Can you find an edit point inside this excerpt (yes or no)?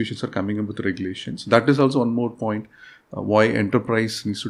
no